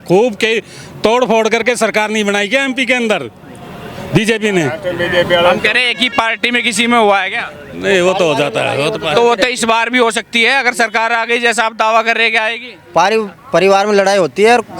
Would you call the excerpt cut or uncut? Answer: uncut